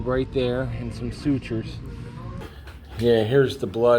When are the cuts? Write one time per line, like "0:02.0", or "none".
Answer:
0:02.4